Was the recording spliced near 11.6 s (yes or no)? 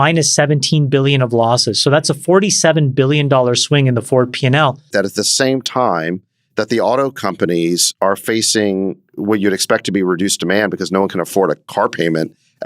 no